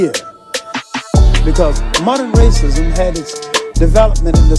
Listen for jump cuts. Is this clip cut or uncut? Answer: cut